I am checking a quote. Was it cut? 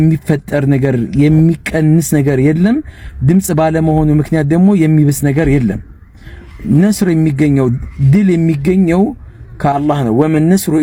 no; 0 cuts

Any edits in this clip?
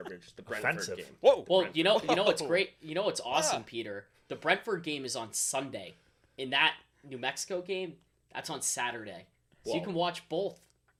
no; 0 cuts

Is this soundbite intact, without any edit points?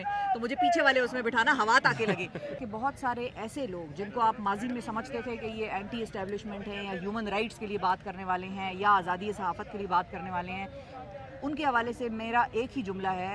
no; 1 cut; at 2.6 s

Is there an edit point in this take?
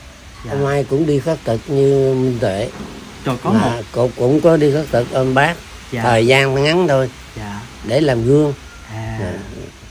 no; 0 cuts

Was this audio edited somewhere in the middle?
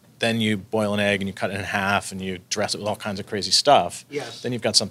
no; 0 cuts

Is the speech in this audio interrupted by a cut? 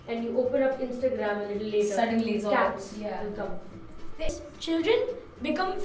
yes; 1 cut; at 4.3 s

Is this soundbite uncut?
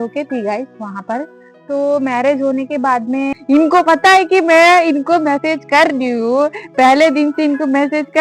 no; 1 cut; at 3.3 s

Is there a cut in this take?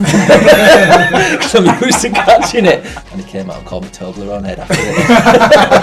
yes; 1 cut; at 3.0 s

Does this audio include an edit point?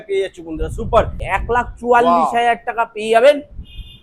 yes; 1 cut; at 1.2 s

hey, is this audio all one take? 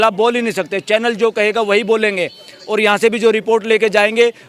yes; 0 cuts

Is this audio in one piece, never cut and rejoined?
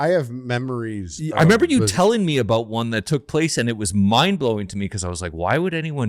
yes; 0 cuts

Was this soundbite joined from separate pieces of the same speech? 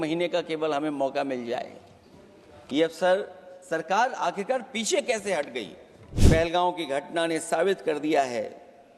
yes; 1 cut; at 6.2 s

